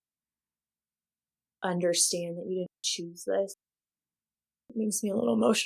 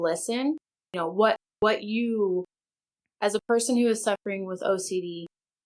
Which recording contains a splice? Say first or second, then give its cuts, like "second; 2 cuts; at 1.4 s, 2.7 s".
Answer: first; 1 cut; at 4.7 s